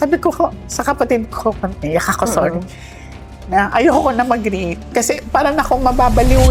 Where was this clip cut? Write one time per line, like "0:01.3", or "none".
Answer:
none